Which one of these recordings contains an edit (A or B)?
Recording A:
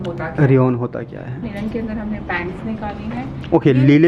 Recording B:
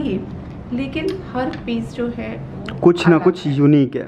A